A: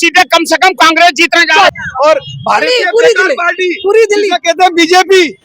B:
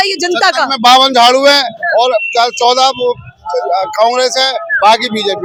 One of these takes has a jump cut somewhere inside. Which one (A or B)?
A